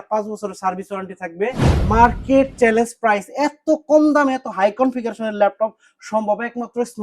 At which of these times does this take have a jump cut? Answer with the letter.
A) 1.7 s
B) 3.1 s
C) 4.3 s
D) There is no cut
A